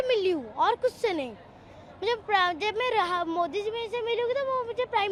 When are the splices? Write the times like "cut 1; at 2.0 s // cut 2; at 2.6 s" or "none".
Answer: none